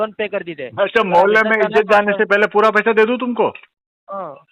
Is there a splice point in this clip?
no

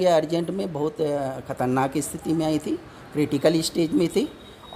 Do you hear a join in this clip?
no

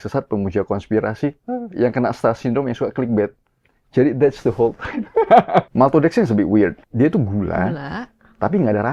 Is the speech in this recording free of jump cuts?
no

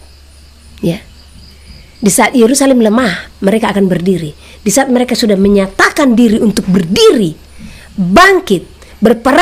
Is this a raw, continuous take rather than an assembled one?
yes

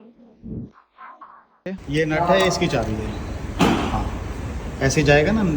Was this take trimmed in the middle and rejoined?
yes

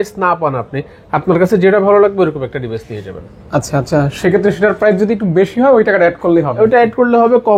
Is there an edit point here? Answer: no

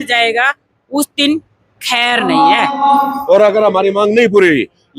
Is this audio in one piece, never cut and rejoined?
no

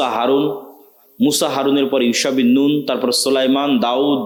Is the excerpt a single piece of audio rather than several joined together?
yes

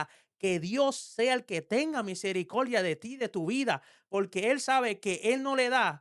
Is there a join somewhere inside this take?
no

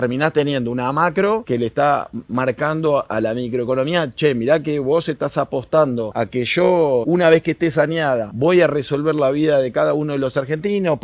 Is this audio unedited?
no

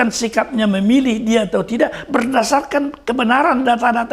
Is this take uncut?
yes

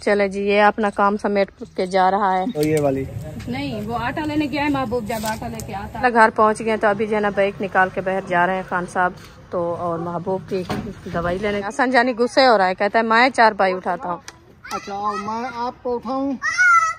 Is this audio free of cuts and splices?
no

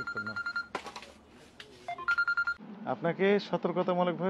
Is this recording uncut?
no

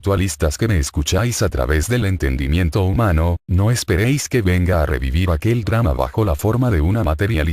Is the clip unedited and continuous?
no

